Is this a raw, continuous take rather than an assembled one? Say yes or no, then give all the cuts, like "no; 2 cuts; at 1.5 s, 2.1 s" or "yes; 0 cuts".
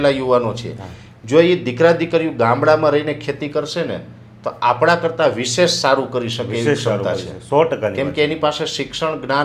yes; 0 cuts